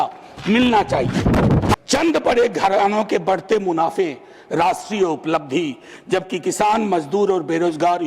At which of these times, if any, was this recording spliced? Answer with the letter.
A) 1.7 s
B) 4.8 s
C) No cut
A